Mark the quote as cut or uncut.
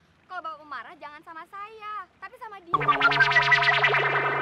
cut